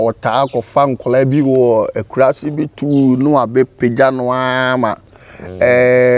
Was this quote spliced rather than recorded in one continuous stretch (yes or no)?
no